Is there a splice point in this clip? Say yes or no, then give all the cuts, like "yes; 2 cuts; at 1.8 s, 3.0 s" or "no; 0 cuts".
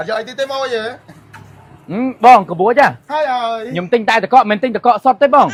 no; 0 cuts